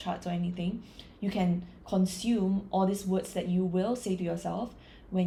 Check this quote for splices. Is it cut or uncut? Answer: uncut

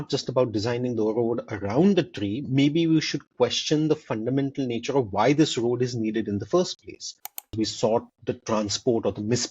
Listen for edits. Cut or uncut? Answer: cut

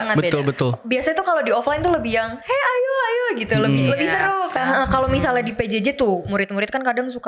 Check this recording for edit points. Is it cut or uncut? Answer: cut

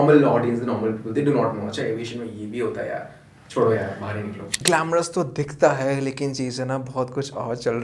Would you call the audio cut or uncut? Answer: cut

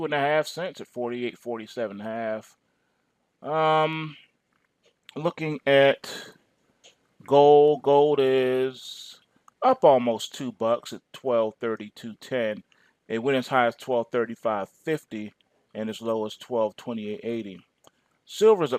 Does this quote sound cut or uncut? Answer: uncut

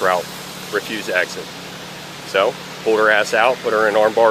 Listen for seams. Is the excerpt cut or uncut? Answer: uncut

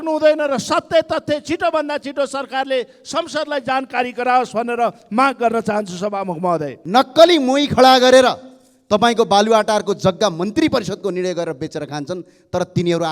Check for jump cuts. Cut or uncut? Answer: cut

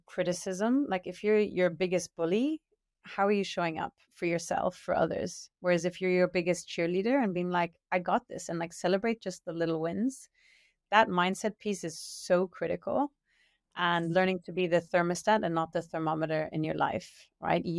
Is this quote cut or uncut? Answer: uncut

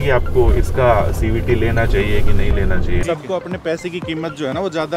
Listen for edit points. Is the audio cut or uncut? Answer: cut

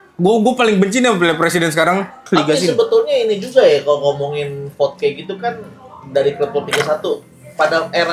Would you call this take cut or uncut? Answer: cut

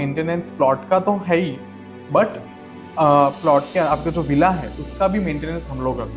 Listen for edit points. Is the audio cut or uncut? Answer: uncut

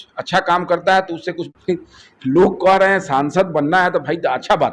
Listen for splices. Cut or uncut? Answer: cut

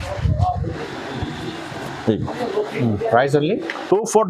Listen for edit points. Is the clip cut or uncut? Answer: uncut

